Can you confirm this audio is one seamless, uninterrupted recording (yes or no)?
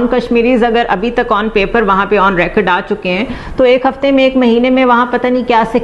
yes